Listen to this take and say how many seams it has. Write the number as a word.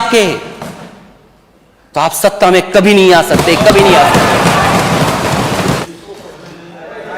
one